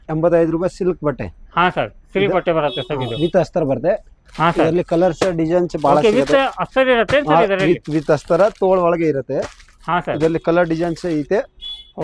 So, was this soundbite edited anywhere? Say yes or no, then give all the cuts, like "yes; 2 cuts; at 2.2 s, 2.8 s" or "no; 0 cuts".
no; 0 cuts